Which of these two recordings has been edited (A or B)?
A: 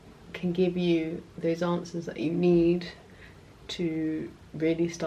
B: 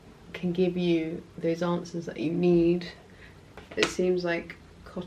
B